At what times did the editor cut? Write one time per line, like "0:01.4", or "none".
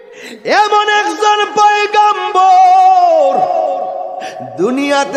none